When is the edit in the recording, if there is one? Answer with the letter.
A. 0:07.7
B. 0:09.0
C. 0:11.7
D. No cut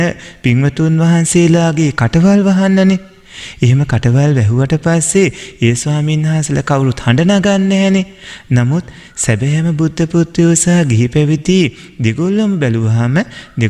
D